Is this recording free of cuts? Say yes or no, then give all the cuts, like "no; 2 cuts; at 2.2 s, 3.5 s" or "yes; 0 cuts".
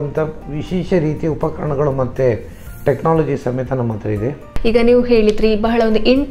no; 1 cut; at 4.5 s